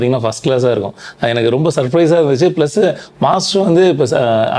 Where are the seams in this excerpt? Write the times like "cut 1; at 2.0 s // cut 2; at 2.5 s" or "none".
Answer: none